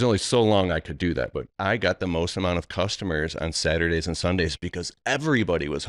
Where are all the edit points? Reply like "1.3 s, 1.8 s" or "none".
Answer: 1.5 s

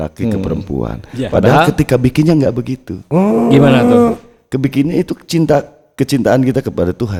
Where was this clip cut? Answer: none

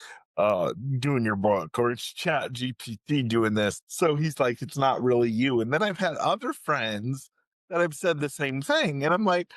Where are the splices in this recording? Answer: 3.8 s

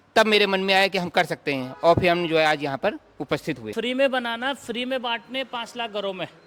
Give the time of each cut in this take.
3.7 s

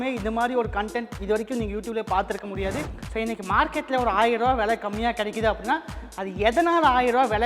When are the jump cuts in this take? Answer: 3.0 s

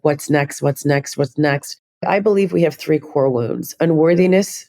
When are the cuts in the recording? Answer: 1.9 s

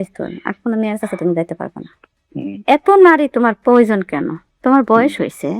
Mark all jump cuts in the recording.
2.2 s

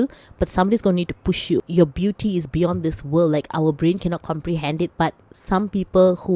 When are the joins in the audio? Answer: 1.6 s, 4.9 s

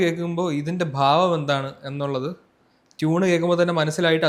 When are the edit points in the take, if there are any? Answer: none

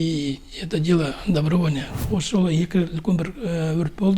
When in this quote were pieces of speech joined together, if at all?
2.0 s

